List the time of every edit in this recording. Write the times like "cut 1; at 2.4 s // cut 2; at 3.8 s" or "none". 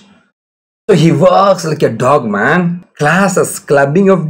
cut 1; at 2.8 s